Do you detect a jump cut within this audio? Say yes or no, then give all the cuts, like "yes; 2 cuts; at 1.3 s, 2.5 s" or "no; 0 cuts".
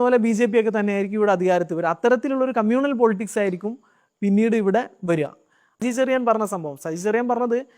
yes; 1 cut; at 5.8 s